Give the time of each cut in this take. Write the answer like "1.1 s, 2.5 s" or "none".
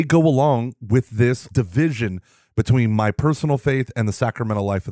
1.5 s